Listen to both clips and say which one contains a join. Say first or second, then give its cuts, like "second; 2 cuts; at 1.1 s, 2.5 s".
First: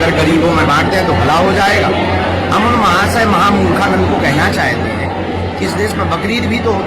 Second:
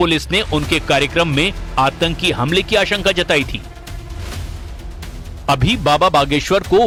first; 1 cut; at 3.1 s